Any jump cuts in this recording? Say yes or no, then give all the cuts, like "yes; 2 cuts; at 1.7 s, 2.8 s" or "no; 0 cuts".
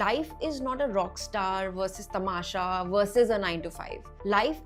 no; 0 cuts